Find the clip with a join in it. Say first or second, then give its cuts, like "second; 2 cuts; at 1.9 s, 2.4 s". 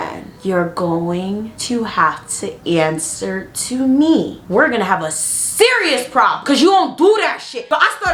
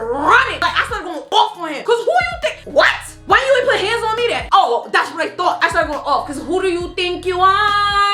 second; 3 cuts; at 3.2 s, 4.4 s, 5.6 s